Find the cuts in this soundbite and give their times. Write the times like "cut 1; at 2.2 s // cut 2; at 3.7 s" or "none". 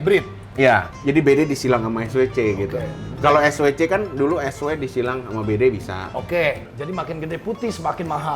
cut 1; at 1.0 s // cut 2; at 6.7 s